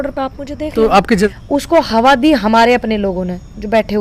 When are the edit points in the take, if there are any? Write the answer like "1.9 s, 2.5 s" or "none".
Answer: 1.3 s